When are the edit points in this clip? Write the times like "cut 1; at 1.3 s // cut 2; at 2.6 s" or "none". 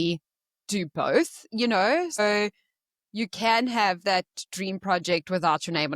cut 1; at 2.2 s